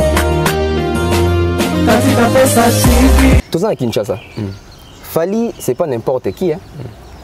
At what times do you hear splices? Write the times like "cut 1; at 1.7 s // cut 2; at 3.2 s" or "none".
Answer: cut 1; at 3.4 s